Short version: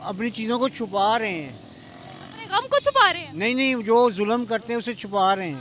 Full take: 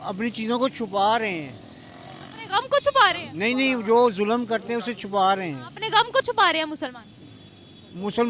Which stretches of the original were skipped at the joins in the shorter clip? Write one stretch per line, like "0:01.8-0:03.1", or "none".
none